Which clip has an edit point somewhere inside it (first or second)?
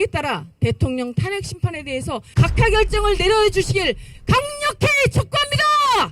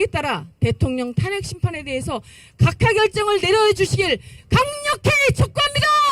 first